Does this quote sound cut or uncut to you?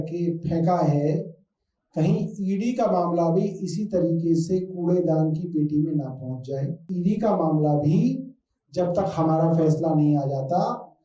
cut